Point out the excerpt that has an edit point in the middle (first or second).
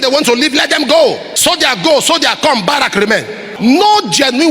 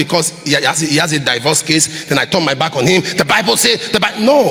first